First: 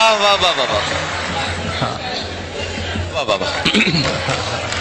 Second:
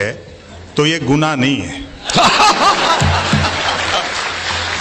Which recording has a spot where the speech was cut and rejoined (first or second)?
first